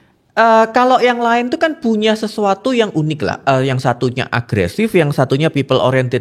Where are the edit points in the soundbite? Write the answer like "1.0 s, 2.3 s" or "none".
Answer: none

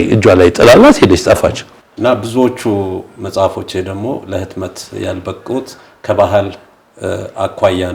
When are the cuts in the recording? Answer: 1.7 s

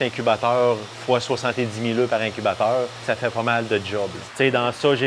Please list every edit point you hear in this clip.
0.9 s, 3.0 s, 4.2 s

